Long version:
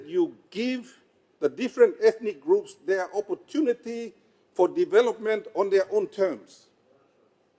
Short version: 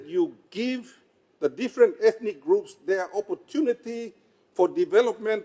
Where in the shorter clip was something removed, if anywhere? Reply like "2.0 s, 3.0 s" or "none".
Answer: none